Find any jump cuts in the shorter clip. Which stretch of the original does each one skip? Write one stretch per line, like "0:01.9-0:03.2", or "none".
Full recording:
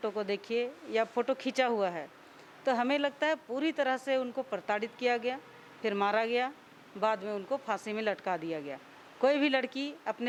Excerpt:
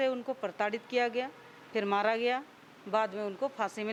none